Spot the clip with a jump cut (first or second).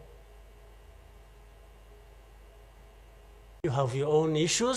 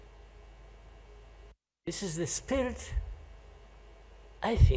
first